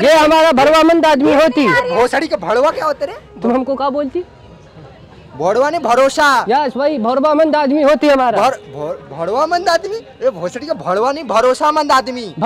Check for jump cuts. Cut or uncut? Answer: uncut